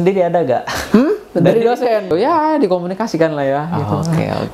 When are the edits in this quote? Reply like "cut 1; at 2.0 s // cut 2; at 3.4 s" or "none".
cut 1; at 2.1 s

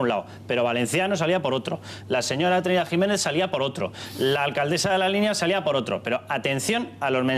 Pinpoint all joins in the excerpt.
cut 1; at 2.9 s

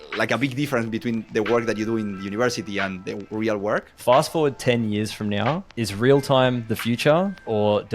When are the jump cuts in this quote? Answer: cut 1; at 3.9 s

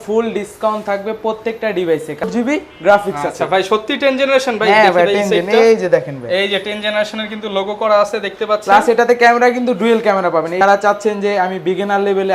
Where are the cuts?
cut 1; at 2.2 s // cut 2; at 10.6 s

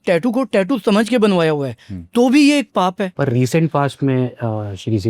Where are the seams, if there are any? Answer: cut 1; at 3.1 s

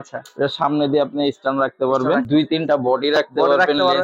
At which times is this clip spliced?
cut 1; at 2.3 s

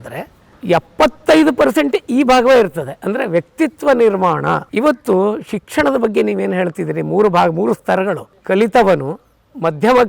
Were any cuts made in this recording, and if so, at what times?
cut 1; at 4.7 s // cut 2; at 8.3 s

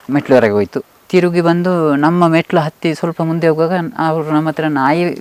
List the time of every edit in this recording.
none

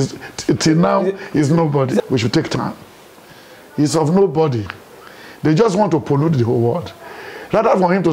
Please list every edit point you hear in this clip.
cut 1; at 2.0 s

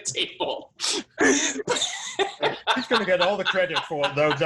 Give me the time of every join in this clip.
none

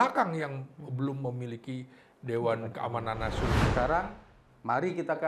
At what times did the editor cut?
cut 1; at 3.5 s

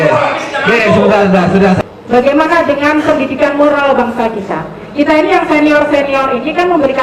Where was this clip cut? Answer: cut 1; at 1.8 s

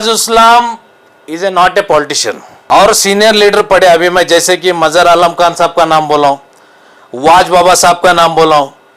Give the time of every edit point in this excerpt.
cut 1; at 2.5 s

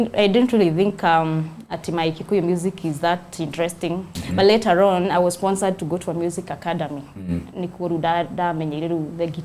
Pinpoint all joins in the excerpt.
cut 1; at 4.2 s

